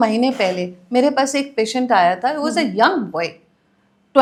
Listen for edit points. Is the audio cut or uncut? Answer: uncut